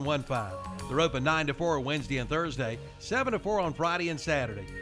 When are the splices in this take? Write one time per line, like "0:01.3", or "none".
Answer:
none